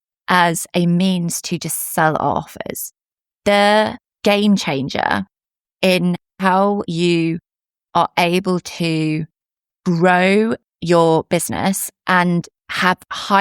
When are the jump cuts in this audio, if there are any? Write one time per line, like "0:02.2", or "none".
0:04.0
0:06.5